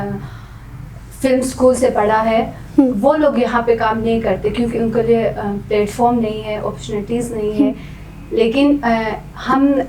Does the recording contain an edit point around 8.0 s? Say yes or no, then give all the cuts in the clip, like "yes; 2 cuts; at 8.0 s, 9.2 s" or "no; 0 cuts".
no; 0 cuts